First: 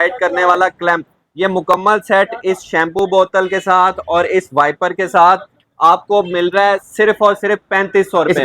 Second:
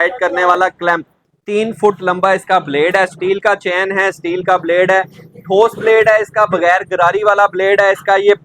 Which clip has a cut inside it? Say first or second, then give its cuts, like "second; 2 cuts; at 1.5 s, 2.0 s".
second; 1 cut; at 1.2 s